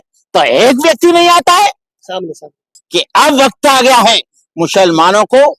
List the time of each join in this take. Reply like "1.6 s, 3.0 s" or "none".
2.7 s